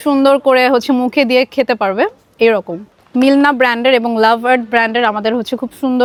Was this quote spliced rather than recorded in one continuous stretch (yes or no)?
no